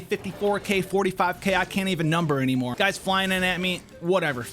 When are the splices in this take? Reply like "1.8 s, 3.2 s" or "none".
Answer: 2.7 s

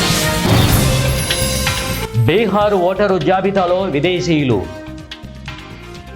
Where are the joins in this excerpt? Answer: none

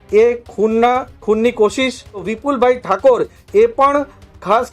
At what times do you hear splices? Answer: 2.3 s

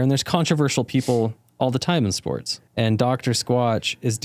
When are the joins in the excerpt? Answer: 2.6 s

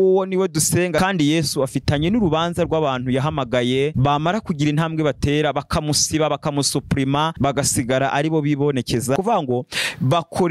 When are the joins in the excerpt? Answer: 1.0 s, 9.2 s

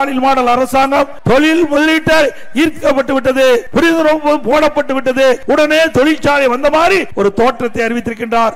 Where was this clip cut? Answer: 1.2 s, 3.7 s, 5.4 s, 7.1 s

